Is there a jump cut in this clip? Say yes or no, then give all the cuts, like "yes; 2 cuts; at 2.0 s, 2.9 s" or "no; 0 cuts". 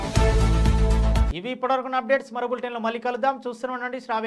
no; 0 cuts